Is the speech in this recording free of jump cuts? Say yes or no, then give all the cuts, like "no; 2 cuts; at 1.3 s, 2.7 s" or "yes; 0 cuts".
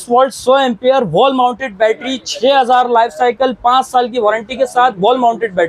yes; 0 cuts